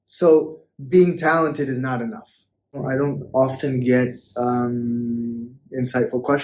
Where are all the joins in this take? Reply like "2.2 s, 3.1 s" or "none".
2.8 s